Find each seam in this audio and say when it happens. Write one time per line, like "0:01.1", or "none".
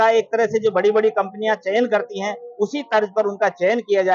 none